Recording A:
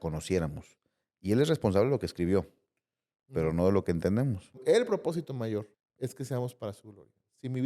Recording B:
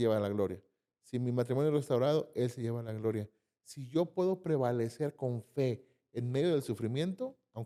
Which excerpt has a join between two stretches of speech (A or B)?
A